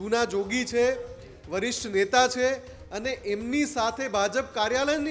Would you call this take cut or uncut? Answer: uncut